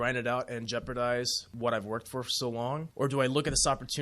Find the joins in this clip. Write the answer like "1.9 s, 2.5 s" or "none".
1.4 s, 2.9 s